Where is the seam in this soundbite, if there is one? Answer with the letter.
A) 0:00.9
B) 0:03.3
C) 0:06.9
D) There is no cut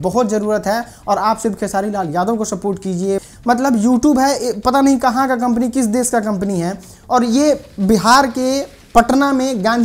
B